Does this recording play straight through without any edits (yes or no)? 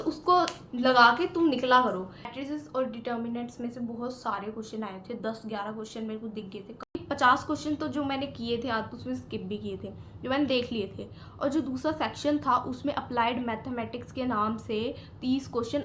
no